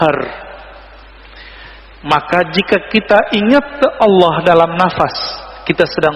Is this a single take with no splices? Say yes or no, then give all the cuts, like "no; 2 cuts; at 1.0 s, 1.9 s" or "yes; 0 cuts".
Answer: yes; 0 cuts